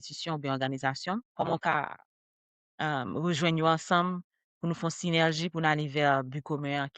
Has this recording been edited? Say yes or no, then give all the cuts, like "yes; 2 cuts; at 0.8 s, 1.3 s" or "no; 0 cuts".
yes; 1 cut; at 1.3 s